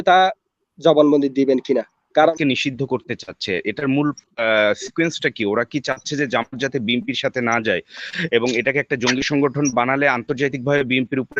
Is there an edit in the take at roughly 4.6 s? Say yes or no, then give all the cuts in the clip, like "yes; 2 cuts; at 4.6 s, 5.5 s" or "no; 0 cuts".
no; 1 cut; at 2.3 s